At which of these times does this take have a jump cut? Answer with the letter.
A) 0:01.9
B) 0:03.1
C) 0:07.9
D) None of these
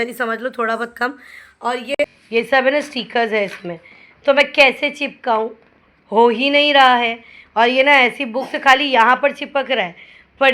A